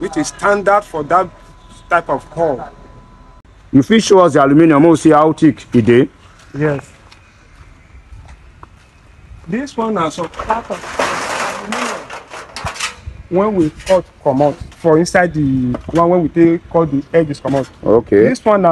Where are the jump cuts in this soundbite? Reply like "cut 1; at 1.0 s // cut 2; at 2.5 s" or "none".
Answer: cut 1; at 3.5 s

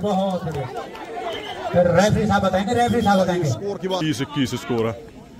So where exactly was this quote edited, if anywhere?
cut 1; at 4.0 s

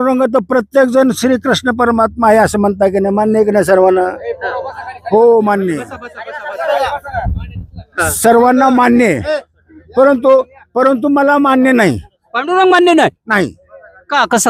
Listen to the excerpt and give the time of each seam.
none

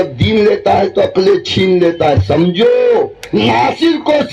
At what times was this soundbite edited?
cut 1; at 3.2 s

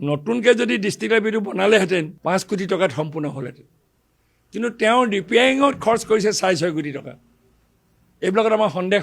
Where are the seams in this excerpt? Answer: cut 1; at 2.1 s

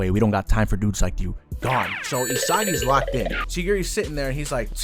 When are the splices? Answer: none

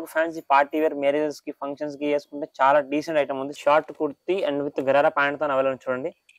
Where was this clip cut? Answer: cut 1; at 3.5 s

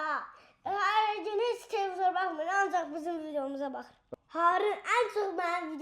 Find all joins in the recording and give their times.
cut 1; at 4.0 s

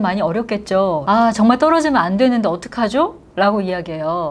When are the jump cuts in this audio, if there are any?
cut 1; at 1.0 s

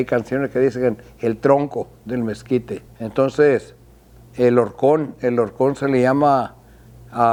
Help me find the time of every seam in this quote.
none

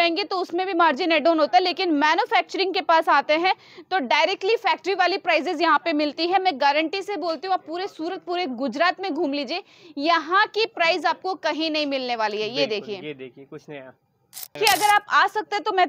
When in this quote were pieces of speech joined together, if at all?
cut 1; at 14.6 s

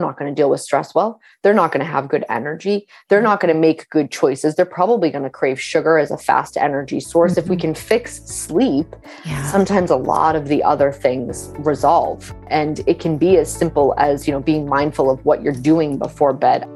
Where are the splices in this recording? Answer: cut 1; at 12.4 s

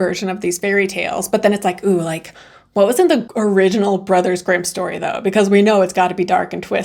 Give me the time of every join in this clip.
cut 1; at 3.3 s

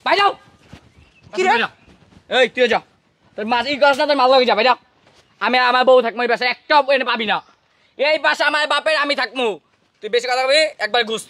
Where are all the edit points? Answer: none

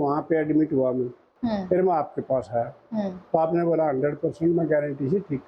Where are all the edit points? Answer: cut 1; at 1.2 s

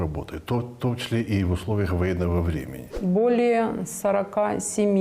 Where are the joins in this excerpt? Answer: cut 1; at 2.9 s

